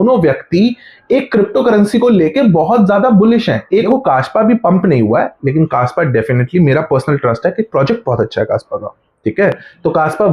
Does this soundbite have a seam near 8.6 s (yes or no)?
no